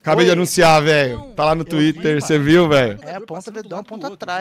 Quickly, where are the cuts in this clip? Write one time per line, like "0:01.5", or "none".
0:03.0